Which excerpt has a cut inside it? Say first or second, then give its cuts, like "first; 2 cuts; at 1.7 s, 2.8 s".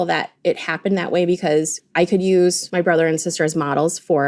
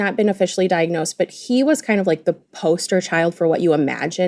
first; 1 cut; at 1.8 s